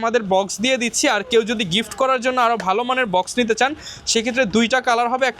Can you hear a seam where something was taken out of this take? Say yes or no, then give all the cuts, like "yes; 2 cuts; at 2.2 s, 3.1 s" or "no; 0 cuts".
no; 0 cuts